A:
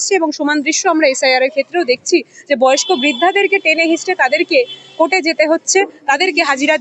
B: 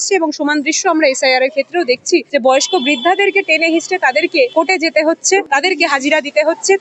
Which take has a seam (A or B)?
B